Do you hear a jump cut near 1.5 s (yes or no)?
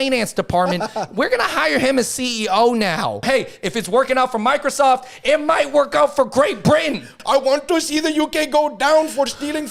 no